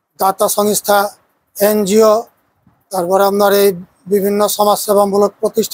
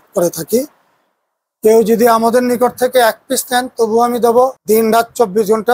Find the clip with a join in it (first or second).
second